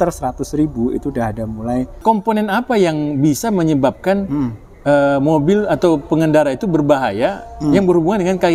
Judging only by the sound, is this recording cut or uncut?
cut